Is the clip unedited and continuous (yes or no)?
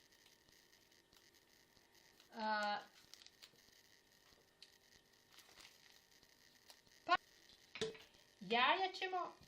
no